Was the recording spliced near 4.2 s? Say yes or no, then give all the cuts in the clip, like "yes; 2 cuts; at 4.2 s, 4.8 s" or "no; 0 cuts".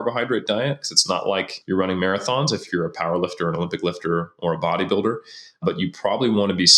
no; 2 cuts; at 1.5 s, 5.6 s